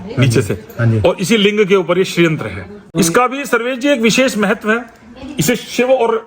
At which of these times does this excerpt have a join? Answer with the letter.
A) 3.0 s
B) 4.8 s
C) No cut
A